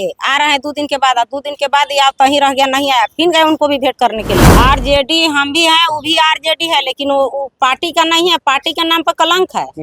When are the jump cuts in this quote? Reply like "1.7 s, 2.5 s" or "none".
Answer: 4.5 s